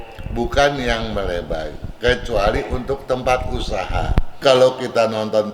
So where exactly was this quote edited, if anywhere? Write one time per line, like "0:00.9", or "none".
0:04.4